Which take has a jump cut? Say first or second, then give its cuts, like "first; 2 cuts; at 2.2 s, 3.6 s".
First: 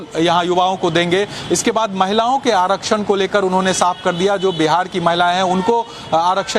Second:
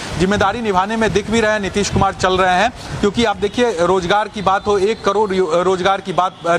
first; 1 cut; at 4.3 s